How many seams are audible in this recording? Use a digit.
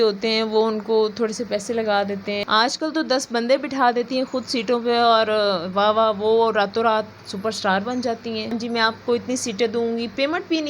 2